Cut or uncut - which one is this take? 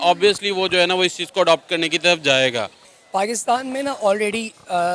cut